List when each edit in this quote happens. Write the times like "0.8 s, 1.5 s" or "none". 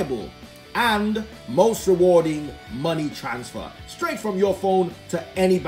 none